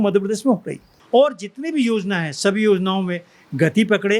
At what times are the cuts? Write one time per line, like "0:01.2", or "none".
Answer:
0:00.9